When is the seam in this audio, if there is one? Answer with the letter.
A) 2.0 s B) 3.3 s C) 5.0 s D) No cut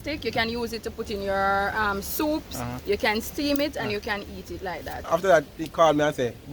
C